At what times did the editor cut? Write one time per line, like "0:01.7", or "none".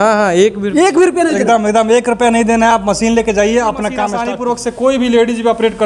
0:04.2